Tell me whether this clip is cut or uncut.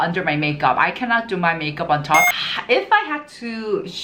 cut